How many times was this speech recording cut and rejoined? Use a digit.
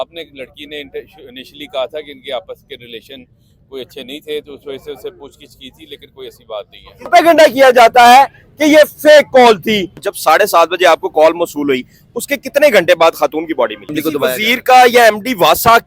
3